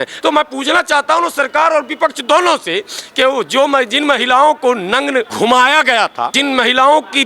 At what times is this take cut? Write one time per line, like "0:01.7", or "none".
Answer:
0:05.3
0:06.3